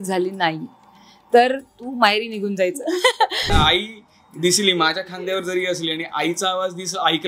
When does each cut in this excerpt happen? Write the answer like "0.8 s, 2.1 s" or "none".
3.5 s